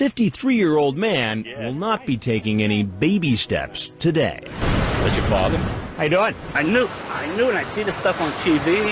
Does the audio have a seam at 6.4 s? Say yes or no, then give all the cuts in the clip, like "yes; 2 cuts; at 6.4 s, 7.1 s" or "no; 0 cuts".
yes; 2 cuts; at 4.6 s, 6.4 s